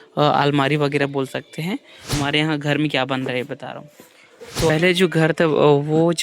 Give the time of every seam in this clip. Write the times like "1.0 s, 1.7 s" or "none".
2.1 s, 4.7 s